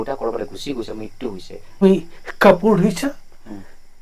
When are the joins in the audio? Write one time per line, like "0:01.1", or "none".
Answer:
0:01.8